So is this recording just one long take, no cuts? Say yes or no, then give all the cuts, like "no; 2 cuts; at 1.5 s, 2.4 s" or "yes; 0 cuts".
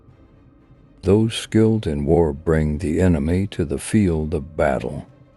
no; 1 cut; at 1.0 s